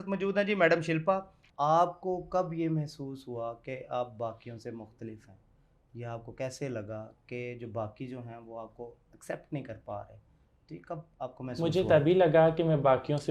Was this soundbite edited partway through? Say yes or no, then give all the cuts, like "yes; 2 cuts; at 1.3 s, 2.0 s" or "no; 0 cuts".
yes; 1 cut; at 1.4 s